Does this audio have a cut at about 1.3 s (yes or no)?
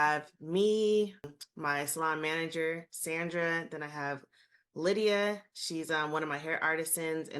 yes